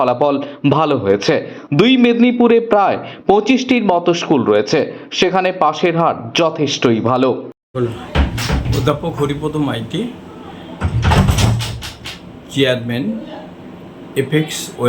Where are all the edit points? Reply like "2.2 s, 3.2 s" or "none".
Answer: 7.5 s